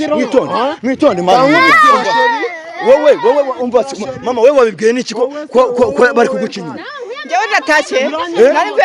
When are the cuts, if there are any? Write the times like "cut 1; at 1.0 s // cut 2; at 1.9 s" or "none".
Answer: none